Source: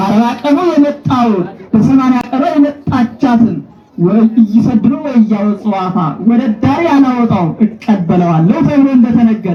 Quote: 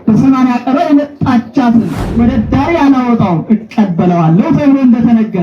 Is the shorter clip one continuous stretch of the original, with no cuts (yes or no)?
no